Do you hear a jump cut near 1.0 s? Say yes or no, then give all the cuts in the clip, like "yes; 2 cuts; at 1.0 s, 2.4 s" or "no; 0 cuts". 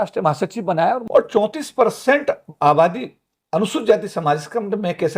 yes; 1 cut; at 1.0 s